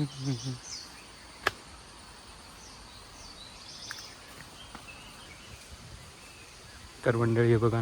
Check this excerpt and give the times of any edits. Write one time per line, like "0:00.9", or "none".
none